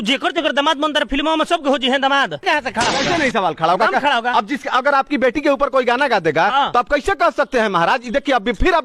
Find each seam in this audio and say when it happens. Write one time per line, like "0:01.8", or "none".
0:02.4